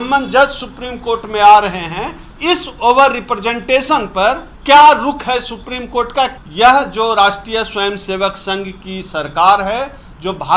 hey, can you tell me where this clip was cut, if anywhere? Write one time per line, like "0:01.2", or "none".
0:02.2
0:04.5
0:06.3